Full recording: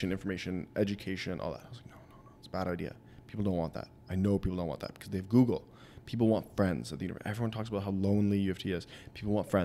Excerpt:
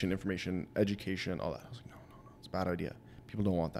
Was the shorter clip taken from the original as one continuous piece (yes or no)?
yes